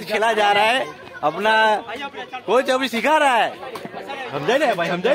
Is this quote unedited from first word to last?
yes; 0 cuts

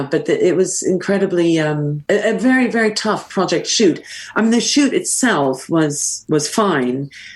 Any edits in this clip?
yes; 1 cut; at 1.9 s

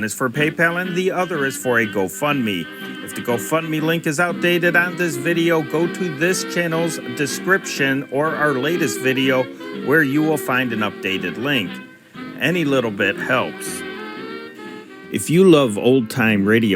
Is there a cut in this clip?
yes; 1 cut; at 15.0 s

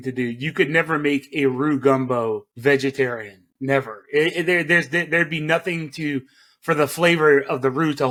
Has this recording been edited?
no; 0 cuts

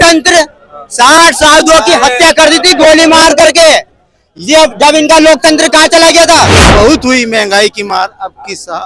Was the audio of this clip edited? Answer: yes; 1 cut; at 6.6 s

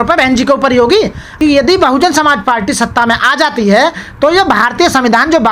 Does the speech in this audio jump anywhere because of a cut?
yes; 1 cut; at 1.2 s

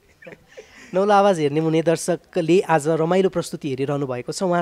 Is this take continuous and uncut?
yes; 0 cuts

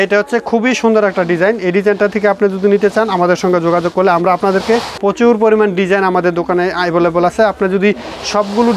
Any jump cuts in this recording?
yes; 1 cut; at 4.9 s

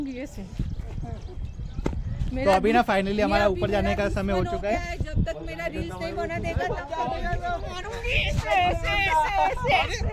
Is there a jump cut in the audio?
no; 0 cuts

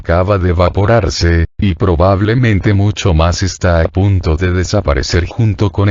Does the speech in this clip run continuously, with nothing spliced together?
yes; 0 cuts

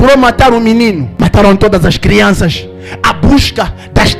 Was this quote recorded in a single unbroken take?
no; 1 cut; at 1.1 s

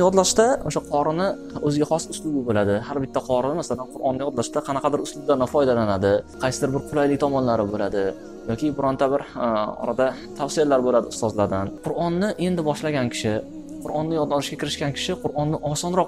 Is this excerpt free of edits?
no; 3 cuts; at 1.5 s, 6.3 s, 11.8 s

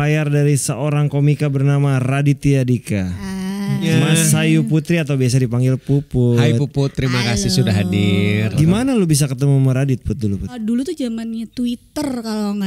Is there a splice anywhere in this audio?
yes; 3 cuts; at 3.9 s, 8.5 s, 10.5 s

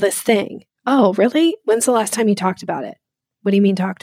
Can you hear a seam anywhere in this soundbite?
no; 0 cuts

